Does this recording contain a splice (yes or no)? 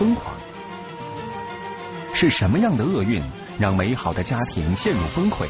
no